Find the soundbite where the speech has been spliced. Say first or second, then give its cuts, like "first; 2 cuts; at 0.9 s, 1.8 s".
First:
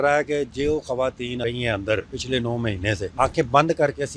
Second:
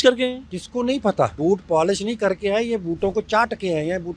first; 1 cut; at 1.4 s